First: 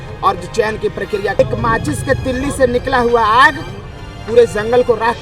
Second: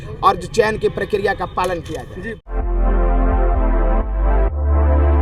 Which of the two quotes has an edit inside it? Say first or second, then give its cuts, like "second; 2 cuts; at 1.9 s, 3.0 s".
first; 1 cut; at 1.4 s